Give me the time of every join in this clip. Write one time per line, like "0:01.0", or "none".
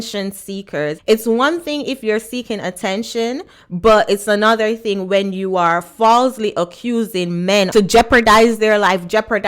0:01.0
0:07.7